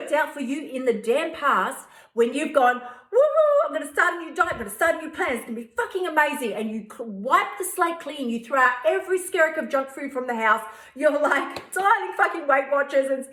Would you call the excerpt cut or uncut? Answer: uncut